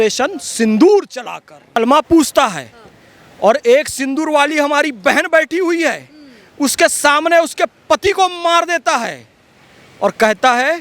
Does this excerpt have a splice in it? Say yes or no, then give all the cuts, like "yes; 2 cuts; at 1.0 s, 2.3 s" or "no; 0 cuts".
yes; 1 cut; at 1.8 s